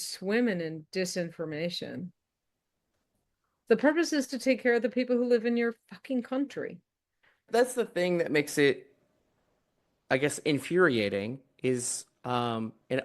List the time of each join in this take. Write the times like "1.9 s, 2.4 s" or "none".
3.6 s, 7.4 s